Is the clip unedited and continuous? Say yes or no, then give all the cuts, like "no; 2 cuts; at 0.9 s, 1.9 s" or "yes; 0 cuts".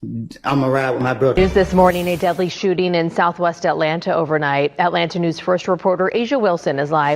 no; 1 cut; at 1.3 s